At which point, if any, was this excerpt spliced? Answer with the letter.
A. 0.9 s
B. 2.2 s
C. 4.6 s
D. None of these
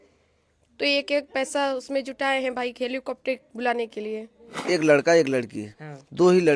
C